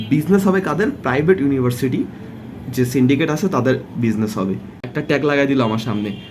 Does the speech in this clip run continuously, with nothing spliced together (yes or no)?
no